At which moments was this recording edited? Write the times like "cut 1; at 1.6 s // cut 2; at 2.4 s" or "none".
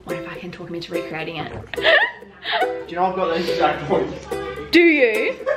cut 1; at 1.6 s